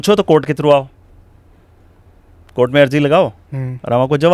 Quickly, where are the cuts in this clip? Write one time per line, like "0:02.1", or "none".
none